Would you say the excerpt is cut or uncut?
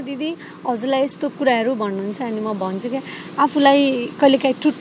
uncut